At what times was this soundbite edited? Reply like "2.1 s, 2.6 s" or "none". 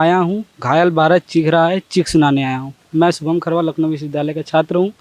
none